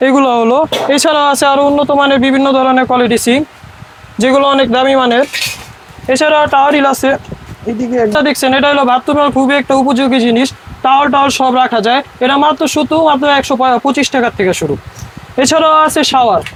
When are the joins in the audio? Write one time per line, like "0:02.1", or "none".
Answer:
none

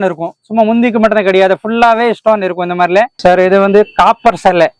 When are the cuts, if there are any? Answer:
0:03.1

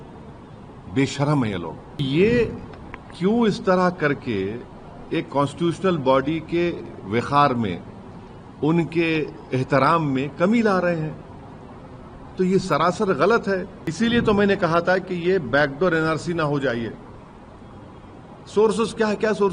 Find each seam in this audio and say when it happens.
0:02.0
0:13.8

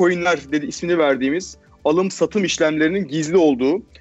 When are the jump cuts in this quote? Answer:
none

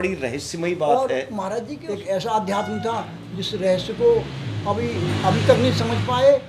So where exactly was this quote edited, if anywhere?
0:01.8

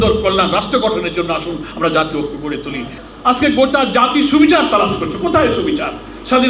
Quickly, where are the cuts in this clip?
0:03.0

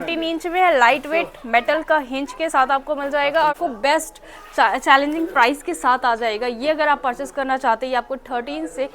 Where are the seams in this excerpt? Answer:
0:03.6

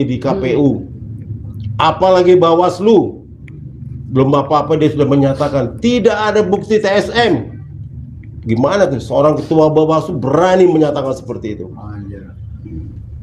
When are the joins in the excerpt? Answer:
none

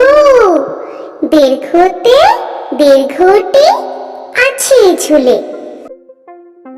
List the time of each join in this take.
0:05.9

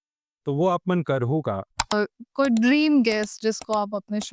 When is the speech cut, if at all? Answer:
0:01.9

